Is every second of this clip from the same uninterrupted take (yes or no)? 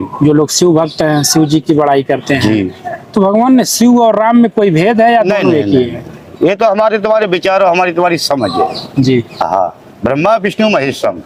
yes